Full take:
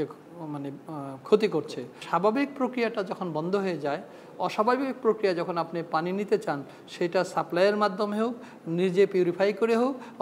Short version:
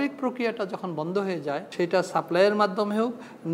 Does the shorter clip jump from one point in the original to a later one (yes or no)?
yes